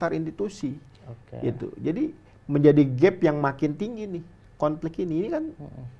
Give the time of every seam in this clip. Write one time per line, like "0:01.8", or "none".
none